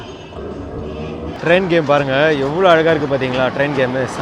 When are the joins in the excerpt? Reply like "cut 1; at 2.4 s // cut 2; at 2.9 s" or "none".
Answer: cut 1; at 1.4 s